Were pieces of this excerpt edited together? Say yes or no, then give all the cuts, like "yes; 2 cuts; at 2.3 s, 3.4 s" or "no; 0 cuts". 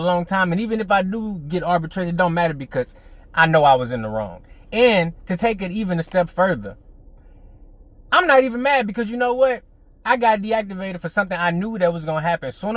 no; 0 cuts